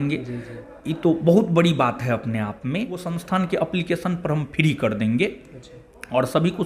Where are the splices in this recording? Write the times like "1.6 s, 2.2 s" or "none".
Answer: 3.1 s